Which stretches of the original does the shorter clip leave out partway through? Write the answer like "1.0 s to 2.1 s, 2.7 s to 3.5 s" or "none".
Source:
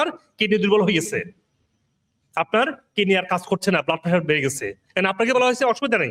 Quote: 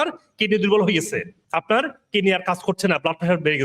1.4 s to 2.2 s

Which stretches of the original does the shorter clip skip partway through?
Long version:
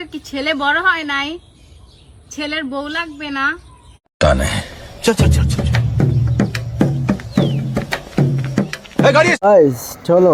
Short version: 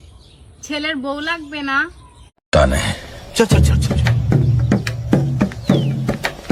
none

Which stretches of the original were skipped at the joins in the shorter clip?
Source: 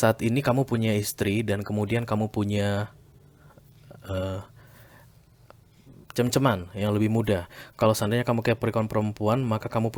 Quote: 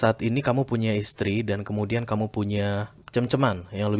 3.0 s to 6.0 s

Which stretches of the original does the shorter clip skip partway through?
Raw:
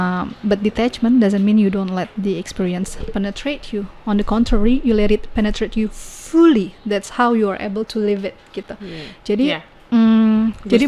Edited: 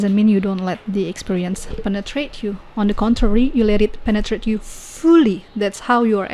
none

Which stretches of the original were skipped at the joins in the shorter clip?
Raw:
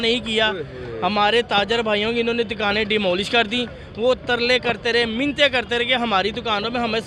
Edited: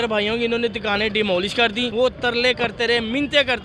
3.6 s to 3.9 s

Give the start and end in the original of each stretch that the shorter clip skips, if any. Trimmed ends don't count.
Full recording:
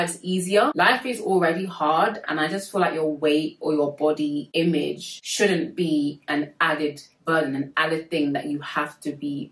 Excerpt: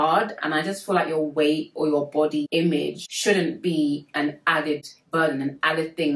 4.5 s to 4.8 s

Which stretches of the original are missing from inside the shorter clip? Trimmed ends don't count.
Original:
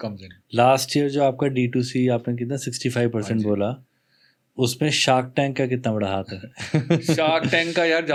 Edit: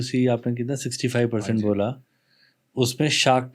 none

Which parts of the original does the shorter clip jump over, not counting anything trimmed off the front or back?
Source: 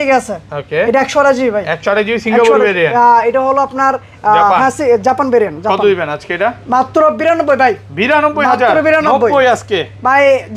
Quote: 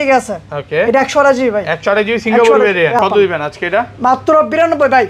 3.0 s to 5.7 s

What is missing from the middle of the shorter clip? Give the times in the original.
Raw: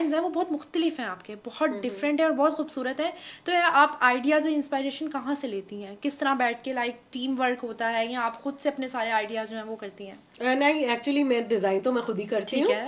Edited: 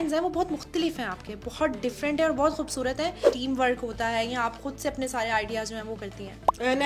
3.3 s to 7.1 s

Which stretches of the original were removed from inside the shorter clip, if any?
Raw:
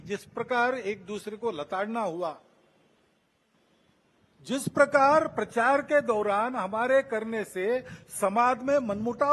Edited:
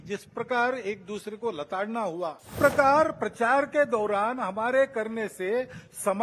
2.5 s to 4.7 s

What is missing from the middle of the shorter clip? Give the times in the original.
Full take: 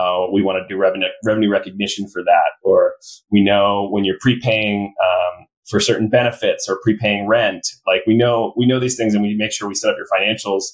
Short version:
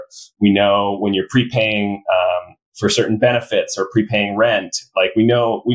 none

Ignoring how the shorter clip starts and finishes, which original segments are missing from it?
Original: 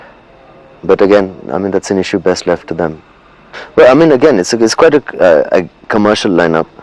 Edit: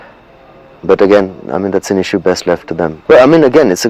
3.0 s to 3.7 s

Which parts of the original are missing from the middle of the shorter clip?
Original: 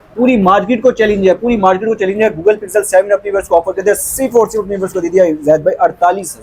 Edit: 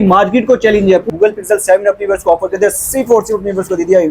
1.4 s to 2.3 s

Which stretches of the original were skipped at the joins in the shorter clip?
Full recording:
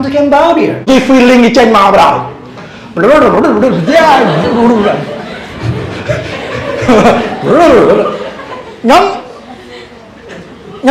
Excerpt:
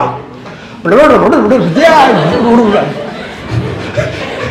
none

